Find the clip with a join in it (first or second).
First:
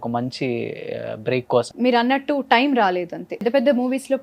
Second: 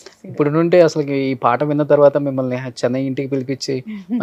first